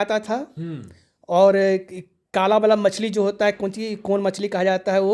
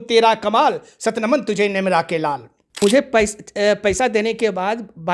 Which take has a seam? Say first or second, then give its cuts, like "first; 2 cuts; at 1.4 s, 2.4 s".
second; 1 cut; at 2.6 s